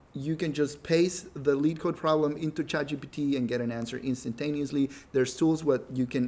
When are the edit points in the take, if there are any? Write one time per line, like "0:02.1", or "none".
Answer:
none